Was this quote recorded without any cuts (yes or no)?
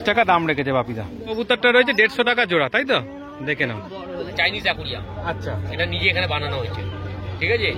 no